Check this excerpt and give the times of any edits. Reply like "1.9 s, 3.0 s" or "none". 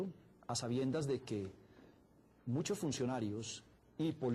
3.2 s